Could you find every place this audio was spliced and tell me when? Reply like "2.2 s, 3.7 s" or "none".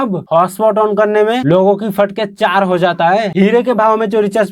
3.3 s

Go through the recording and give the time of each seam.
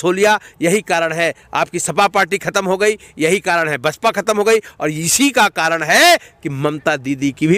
none

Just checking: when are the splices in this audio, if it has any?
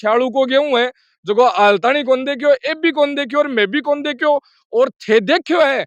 none

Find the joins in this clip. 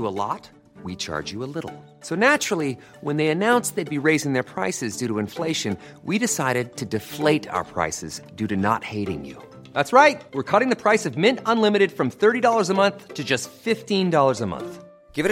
none

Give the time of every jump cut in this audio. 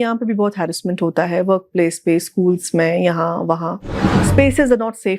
4.2 s

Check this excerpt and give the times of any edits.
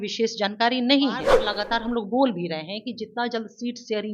1.3 s

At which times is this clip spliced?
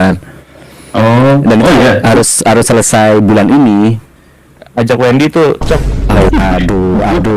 6.3 s

